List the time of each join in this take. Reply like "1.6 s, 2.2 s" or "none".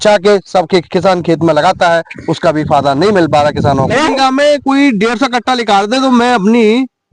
4.0 s